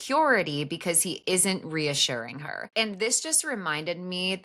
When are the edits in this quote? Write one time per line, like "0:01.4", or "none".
0:02.6